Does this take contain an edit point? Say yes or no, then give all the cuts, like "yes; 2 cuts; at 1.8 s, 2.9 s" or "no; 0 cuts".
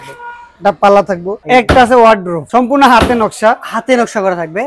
yes; 2 cuts; at 1.3 s, 2.4 s